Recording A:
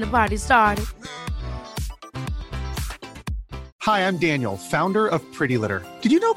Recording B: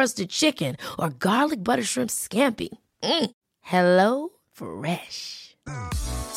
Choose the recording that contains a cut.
A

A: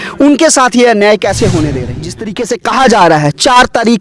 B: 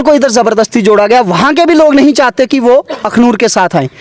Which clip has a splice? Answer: A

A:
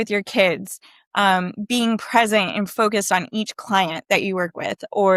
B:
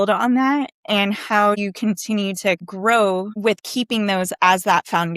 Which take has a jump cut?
B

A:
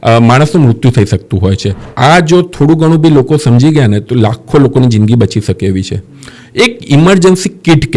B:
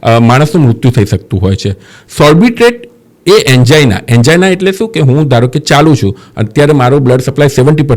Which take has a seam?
A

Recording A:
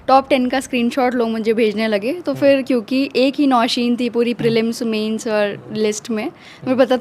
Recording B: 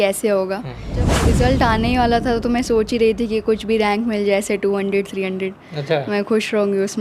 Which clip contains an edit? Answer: B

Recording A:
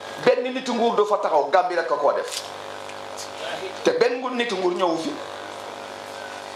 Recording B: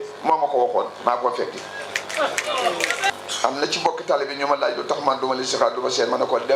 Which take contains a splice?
B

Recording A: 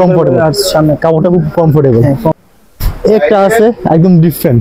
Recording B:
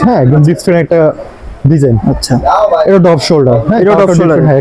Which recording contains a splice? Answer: A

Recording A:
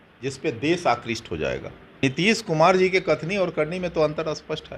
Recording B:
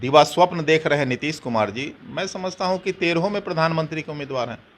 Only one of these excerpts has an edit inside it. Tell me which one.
A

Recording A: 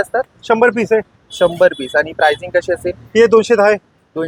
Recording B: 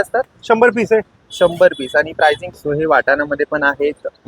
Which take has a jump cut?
B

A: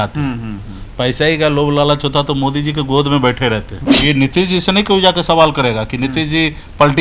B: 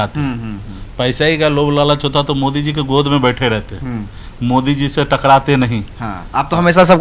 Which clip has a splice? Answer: A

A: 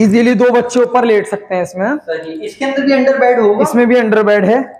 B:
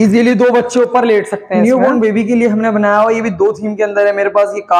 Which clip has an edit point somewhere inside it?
B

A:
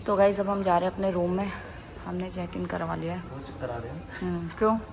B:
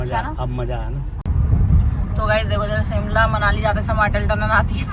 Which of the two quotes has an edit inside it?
B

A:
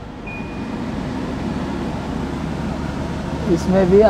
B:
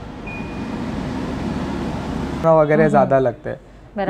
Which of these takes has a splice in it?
B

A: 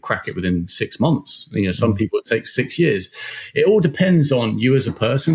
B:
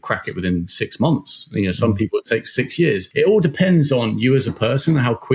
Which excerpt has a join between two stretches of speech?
B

